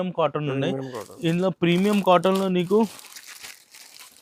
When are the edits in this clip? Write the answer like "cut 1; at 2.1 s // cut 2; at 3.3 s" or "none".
none